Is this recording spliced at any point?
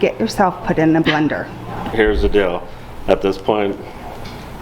yes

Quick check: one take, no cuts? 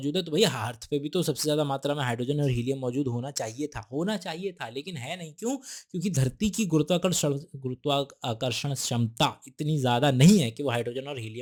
yes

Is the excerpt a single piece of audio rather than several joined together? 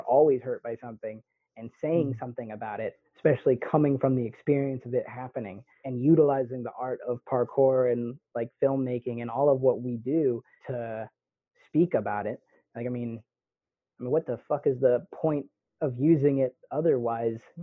no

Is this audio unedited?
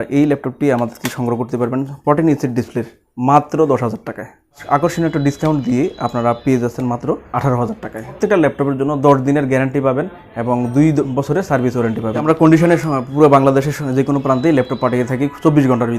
no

